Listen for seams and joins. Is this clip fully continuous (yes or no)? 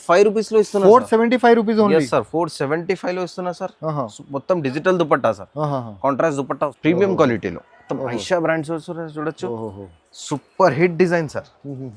no